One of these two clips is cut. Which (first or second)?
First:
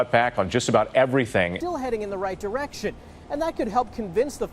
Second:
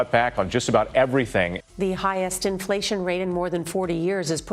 first